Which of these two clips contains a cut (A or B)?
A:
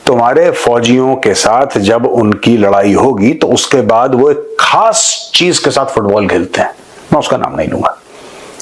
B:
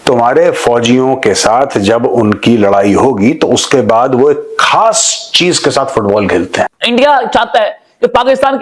B